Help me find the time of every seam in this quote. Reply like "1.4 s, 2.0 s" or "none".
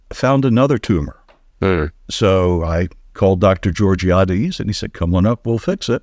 2.0 s, 3.0 s